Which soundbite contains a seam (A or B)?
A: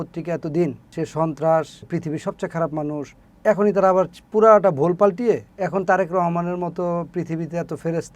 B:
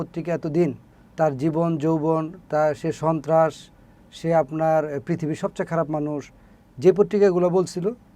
A